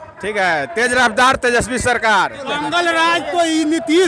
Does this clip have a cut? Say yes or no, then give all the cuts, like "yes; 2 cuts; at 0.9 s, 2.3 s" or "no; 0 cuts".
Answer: yes; 1 cut; at 2.5 s